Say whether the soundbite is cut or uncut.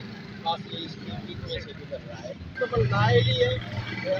cut